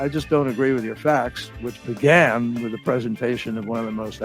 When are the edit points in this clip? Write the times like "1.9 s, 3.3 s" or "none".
1.4 s